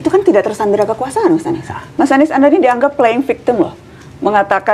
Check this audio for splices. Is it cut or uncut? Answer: cut